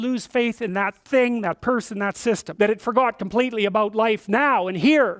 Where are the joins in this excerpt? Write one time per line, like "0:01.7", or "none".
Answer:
0:02.5